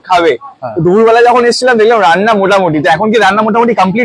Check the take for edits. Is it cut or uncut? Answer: uncut